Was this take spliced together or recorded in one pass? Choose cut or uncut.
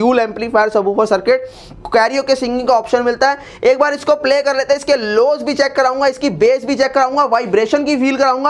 uncut